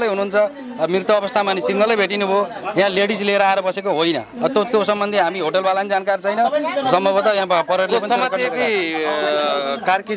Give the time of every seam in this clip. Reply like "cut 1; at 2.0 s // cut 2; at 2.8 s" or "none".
none